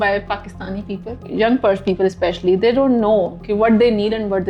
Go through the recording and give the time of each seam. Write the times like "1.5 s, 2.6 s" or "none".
1.3 s